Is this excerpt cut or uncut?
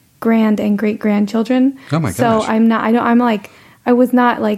uncut